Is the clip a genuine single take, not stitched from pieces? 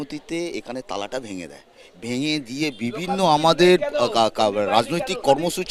yes; 0 cuts

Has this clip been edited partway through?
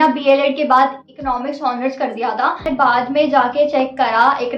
yes; 1 cut; at 2.6 s

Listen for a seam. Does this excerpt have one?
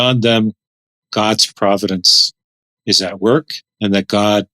yes; 1 cut; at 3.6 s

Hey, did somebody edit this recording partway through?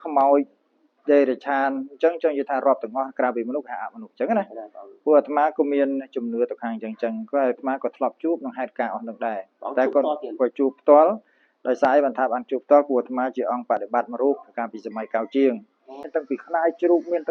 yes; 1 cut; at 16.1 s

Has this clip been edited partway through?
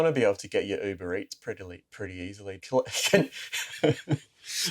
yes; 1 cut; at 2.6 s

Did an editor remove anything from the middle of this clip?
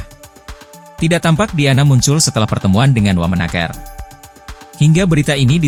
no; 0 cuts

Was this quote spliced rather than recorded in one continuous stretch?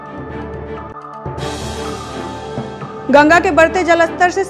yes; 2 cuts; at 0.9 s, 2.8 s

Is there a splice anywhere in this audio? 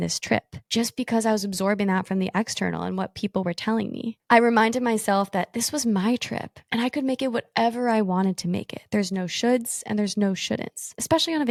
no; 0 cuts

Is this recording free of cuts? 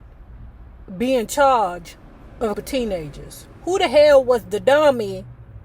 no; 1 cut; at 2.6 s

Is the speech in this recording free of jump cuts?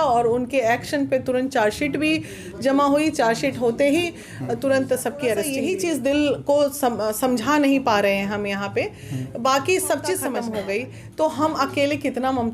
no; 2 cuts; at 5.6 s, 10.4 s

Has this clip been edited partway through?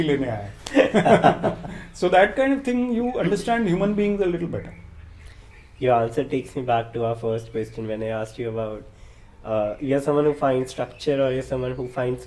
no; 0 cuts

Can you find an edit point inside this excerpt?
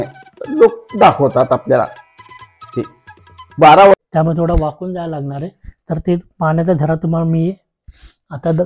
yes; 1 cut; at 3.9 s

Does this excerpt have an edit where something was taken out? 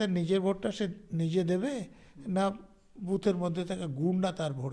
no; 0 cuts

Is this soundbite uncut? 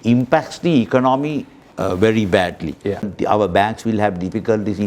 no; 1 cut; at 3.1 s

